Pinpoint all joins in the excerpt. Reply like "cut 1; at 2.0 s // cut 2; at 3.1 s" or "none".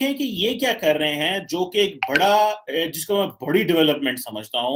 none